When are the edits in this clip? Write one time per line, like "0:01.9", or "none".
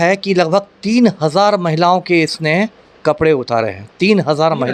none